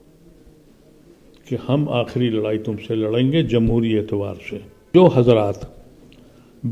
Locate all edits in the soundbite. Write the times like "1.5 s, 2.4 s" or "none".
4.9 s